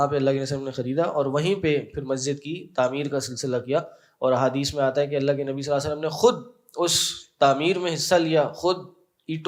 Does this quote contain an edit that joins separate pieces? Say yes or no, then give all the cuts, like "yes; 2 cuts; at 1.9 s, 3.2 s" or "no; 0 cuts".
no; 0 cuts